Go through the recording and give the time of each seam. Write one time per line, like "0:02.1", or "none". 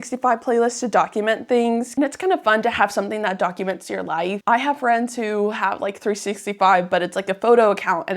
0:01.9
0:04.4